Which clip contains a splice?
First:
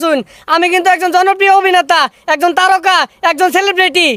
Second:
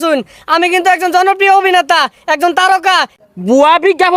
second; 1 cut; at 3.1 s

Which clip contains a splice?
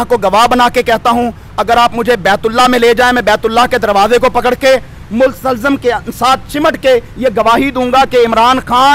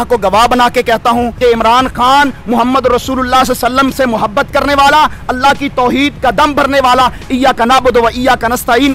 second; 1 cut; at 1.4 s

